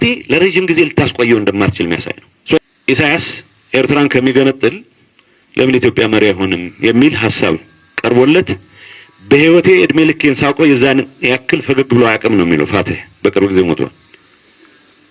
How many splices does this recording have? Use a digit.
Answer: 1